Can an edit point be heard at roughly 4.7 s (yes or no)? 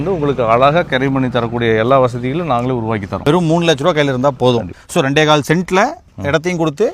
yes